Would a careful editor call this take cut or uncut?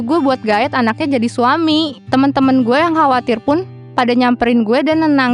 cut